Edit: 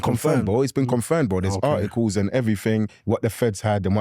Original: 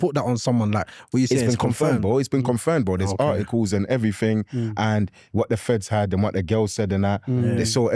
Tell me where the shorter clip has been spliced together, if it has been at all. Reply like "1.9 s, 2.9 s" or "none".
2.9 s

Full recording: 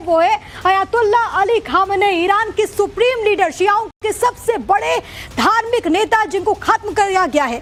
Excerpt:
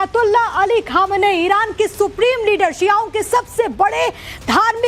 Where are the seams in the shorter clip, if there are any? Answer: 3.1 s

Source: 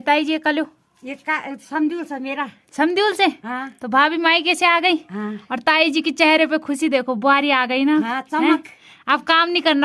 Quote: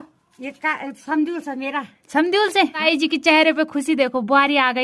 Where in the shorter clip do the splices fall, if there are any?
2.8 s

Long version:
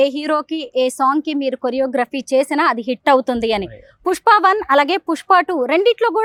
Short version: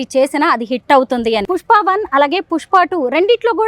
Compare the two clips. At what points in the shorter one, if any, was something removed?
1.4 s

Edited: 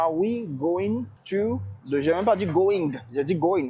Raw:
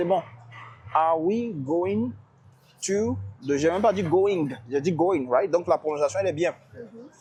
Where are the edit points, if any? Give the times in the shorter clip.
1.1 s

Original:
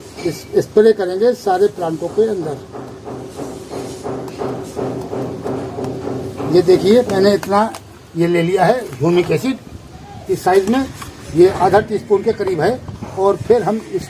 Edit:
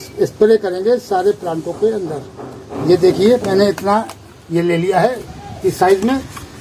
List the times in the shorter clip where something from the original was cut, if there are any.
2.7 s, 5.2 s

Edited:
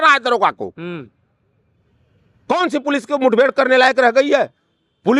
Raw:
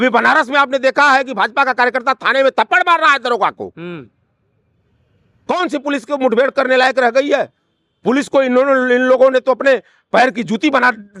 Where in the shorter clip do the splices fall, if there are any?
none

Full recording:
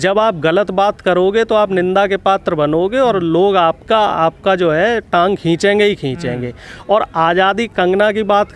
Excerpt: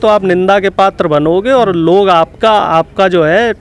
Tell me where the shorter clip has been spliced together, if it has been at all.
none

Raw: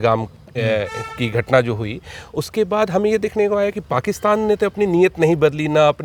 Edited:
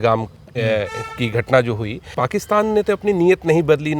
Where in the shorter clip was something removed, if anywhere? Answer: 2.1 s

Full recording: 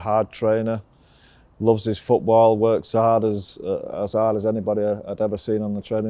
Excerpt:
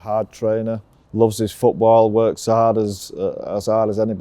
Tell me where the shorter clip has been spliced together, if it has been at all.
0.9 s

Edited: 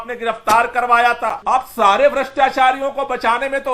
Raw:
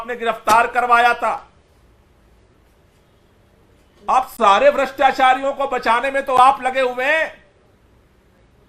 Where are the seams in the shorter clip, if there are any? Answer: 1.4 s

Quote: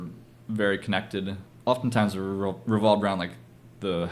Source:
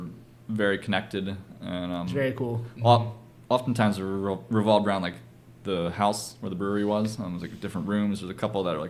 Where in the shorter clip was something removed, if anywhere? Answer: 1.4 s

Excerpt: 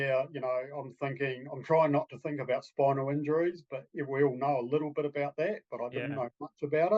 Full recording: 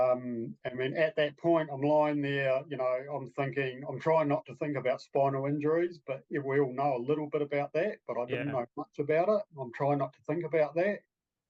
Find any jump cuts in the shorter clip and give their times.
none

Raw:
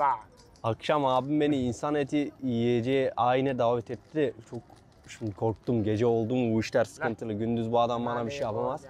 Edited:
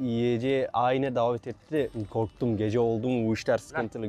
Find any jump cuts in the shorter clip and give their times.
2.0 s

